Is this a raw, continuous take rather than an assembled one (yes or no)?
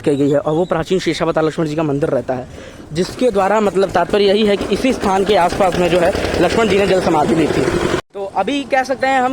yes